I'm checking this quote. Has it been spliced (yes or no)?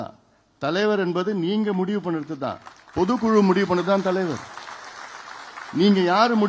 no